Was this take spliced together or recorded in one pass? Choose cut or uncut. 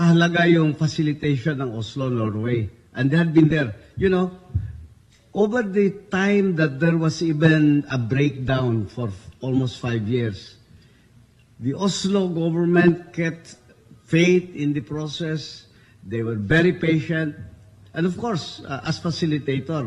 uncut